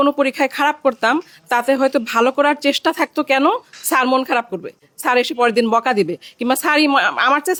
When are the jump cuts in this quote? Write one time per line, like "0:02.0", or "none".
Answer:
none

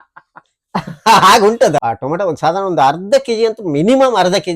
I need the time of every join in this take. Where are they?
0:01.8

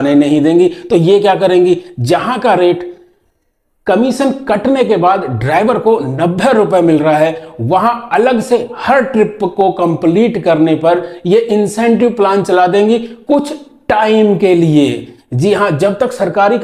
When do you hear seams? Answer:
none

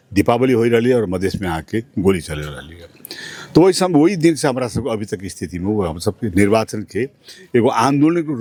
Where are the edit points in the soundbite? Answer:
none

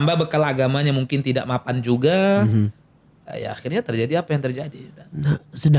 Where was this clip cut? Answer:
none

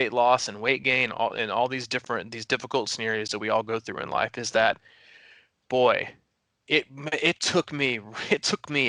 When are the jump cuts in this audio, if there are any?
none

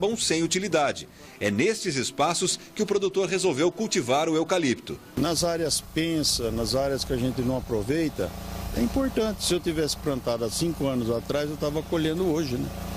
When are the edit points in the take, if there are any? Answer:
0:02.1

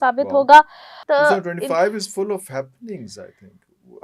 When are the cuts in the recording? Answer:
0:01.0

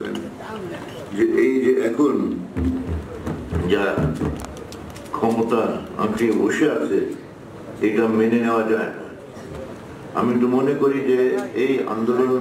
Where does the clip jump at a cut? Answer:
none

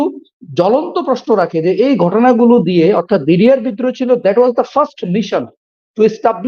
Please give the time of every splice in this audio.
none

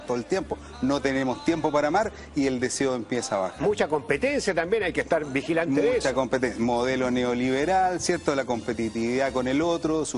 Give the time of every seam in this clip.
0:07.4

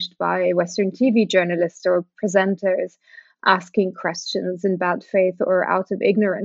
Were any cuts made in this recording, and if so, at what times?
none

